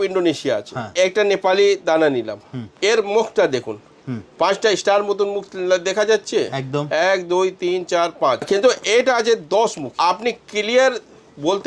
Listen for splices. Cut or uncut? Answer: cut